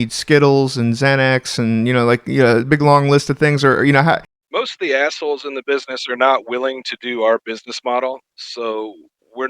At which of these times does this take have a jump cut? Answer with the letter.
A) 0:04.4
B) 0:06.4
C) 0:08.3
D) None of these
A